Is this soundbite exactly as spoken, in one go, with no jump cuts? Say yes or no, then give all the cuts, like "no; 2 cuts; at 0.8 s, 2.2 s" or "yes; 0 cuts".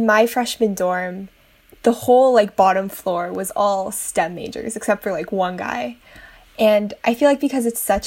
yes; 0 cuts